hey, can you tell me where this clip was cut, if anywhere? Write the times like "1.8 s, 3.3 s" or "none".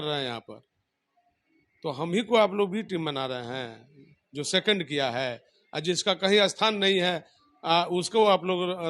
none